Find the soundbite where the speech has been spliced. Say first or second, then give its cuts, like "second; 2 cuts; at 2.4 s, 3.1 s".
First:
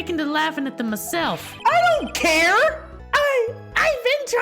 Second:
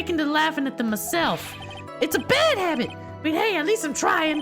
first; 2 cuts; at 1.5 s, 2.9 s